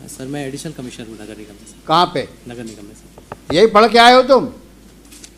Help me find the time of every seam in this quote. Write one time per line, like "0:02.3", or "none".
none